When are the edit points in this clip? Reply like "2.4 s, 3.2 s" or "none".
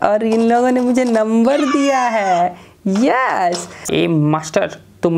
3.8 s